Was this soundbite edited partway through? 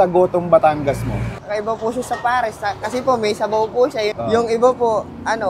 yes; 1 cut; at 4.1 s

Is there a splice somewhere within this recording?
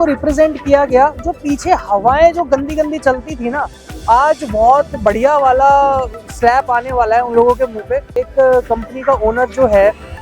yes; 1 cut; at 8.2 s

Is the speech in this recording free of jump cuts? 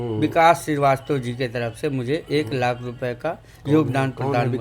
yes; 0 cuts

